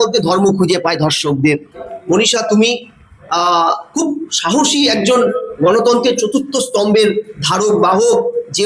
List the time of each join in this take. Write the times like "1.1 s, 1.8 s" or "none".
1.9 s